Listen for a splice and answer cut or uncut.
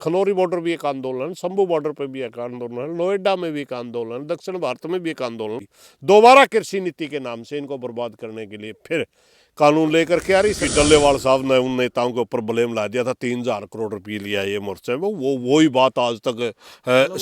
cut